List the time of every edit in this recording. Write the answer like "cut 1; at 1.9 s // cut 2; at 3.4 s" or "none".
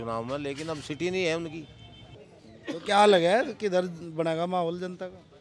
cut 1; at 2.1 s